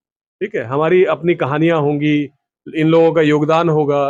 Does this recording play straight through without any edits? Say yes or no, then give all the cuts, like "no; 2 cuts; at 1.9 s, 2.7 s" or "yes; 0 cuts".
yes; 0 cuts